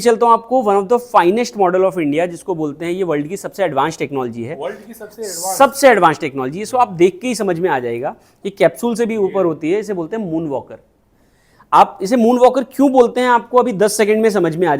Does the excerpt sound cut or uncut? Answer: uncut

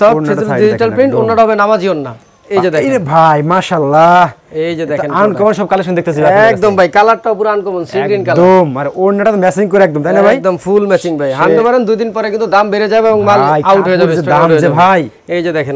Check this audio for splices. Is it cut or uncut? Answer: cut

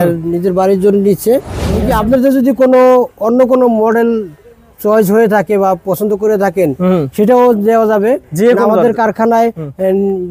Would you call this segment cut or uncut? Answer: cut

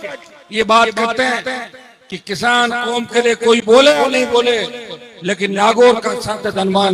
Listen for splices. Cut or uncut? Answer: uncut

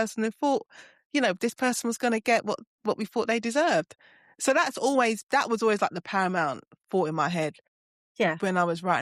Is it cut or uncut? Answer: uncut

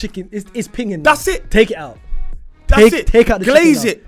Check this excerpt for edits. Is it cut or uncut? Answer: uncut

